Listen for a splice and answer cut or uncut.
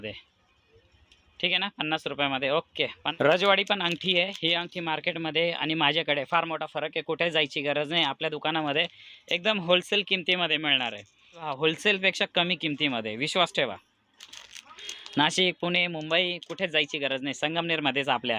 cut